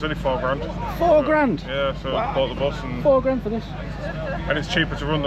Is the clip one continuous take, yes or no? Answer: yes